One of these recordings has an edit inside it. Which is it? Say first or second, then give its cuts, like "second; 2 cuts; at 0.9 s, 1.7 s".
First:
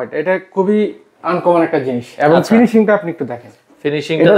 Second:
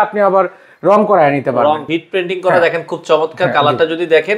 second; 1 cut; at 1.8 s